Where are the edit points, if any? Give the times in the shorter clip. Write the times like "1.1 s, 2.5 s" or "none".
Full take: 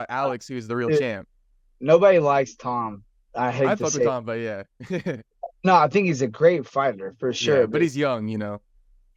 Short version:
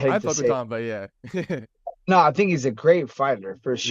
none